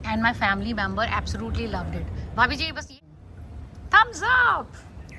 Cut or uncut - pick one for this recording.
cut